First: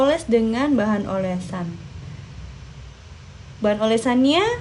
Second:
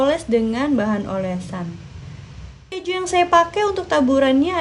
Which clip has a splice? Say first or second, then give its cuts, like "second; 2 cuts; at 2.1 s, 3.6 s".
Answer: second; 1 cut; at 3.0 s